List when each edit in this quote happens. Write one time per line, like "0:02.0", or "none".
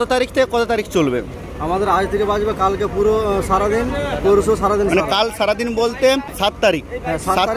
0:06.5